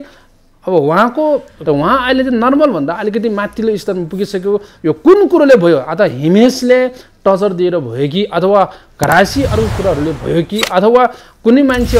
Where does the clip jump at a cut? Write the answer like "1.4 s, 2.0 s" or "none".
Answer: 1.5 s